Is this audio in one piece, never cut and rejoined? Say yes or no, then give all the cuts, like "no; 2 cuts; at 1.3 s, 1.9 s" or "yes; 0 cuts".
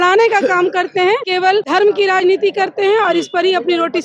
no; 1 cut; at 1.4 s